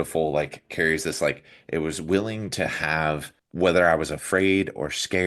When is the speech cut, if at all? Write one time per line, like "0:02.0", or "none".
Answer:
0:03.4